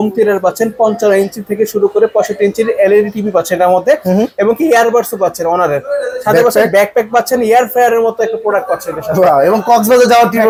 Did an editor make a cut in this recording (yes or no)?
no